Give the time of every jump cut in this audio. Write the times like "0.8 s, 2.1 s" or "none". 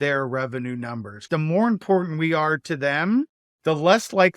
1.3 s, 3.4 s